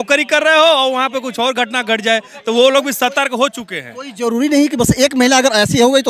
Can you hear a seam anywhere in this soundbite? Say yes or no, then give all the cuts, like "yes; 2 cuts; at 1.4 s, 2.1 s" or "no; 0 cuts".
no; 0 cuts